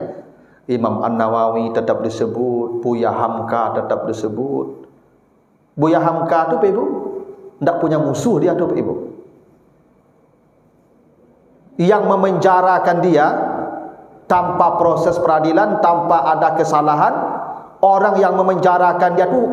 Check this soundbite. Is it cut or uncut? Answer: uncut